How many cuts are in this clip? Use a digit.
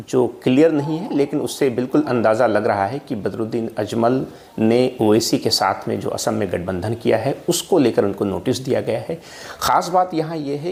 0